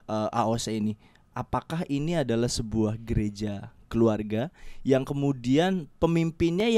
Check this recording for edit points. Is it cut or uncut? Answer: uncut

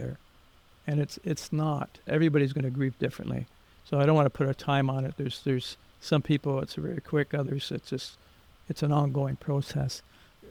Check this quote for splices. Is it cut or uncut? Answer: uncut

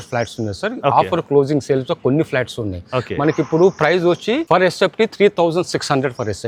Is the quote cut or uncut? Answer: uncut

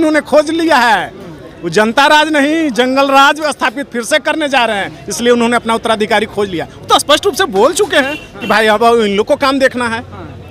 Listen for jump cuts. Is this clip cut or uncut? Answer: uncut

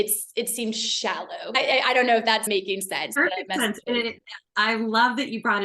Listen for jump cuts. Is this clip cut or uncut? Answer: cut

